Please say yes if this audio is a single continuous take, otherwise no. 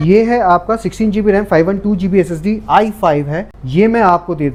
yes